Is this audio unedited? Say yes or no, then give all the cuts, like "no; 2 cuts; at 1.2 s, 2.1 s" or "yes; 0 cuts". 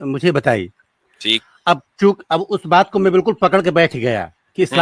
yes; 0 cuts